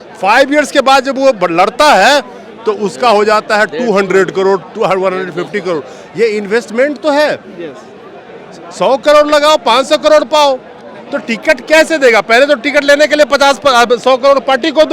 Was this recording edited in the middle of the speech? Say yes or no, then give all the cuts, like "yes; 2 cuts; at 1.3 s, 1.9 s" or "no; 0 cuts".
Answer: no; 0 cuts